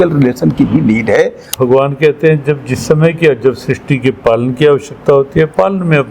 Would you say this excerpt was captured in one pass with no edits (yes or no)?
no